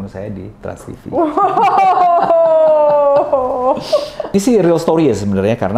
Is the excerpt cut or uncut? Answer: cut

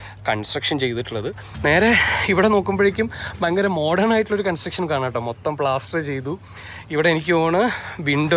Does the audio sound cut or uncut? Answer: cut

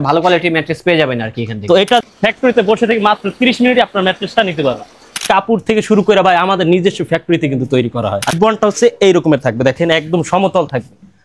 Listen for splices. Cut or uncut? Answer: cut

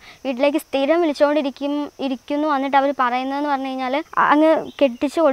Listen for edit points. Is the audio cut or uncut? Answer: cut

